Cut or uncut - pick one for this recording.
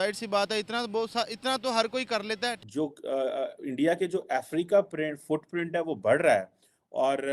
cut